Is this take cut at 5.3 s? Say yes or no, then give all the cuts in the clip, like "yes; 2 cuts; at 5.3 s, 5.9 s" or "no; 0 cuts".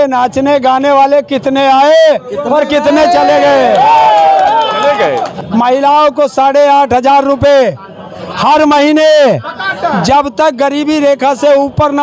yes; 1 cut; at 5.3 s